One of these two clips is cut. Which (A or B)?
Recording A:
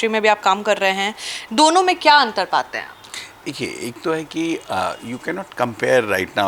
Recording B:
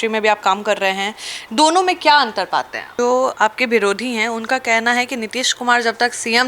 B